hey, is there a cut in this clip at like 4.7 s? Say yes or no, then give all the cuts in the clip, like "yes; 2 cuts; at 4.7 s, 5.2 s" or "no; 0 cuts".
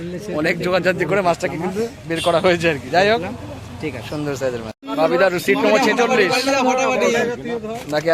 yes; 1 cut; at 4.7 s